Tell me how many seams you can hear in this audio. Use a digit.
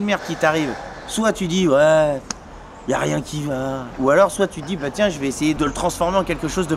1